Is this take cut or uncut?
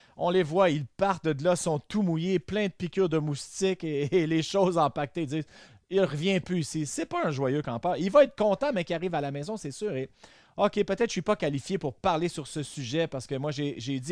uncut